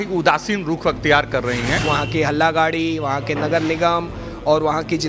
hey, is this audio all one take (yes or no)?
no